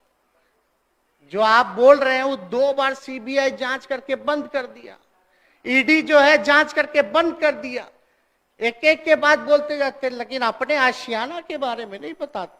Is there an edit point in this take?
no; 0 cuts

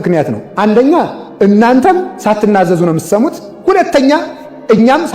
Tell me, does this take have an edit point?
yes; 2 cuts; at 2.1 s, 3.5 s

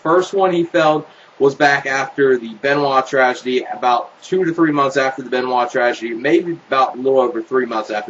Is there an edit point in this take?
yes; 1 cut; at 3.2 s

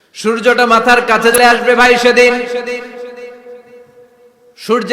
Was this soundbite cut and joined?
yes; 1 cut; at 1.4 s

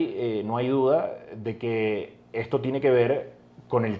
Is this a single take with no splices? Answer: yes; 0 cuts

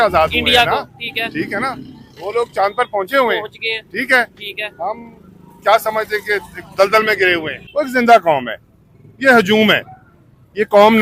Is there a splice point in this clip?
yes; 1 cut; at 7.6 s

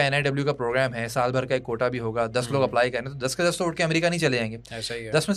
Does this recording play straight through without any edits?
yes; 0 cuts

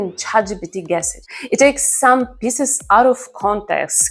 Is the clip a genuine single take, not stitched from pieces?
no; 1 cut; at 1.2 s

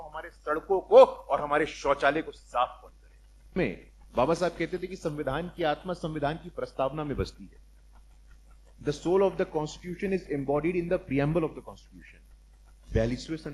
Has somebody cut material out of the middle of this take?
yes; 1 cut; at 3.6 s

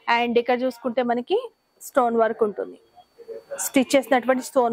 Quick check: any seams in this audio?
no; 0 cuts

